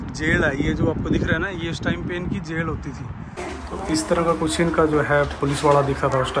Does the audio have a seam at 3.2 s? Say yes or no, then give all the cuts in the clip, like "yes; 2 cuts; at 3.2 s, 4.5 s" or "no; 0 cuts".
yes; 1 cut; at 3.2 s